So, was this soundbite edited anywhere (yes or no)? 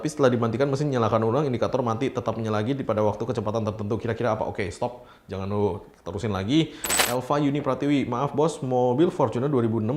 yes